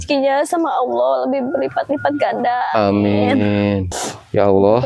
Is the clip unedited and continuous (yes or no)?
no